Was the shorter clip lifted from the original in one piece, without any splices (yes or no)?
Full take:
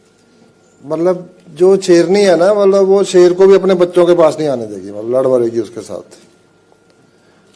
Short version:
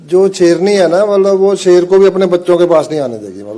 yes